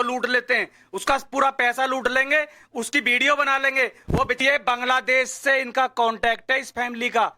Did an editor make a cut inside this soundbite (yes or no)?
yes